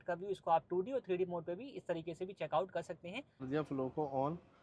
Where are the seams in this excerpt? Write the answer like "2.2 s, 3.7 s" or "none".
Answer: 3.4 s